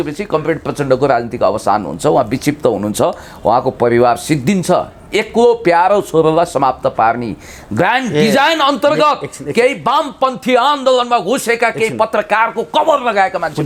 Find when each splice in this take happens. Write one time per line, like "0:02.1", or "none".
none